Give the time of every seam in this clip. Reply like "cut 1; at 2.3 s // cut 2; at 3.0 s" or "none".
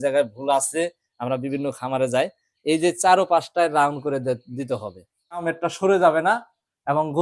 cut 1; at 5.5 s